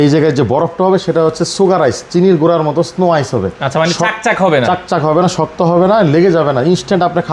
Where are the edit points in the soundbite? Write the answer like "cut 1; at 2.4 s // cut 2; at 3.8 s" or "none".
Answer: none